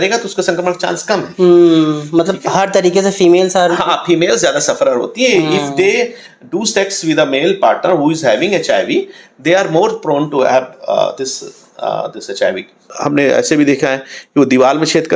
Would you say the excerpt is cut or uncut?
cut